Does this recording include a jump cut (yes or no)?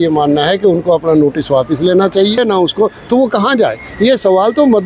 yes